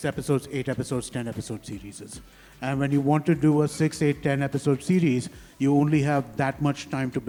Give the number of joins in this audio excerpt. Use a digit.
0